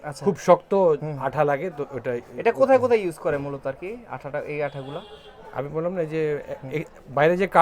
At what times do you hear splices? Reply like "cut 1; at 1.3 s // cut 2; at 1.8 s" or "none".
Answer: none